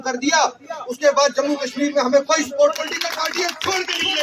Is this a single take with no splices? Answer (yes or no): no